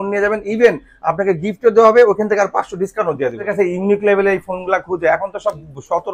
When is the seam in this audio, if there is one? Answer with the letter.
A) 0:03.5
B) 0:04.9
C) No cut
A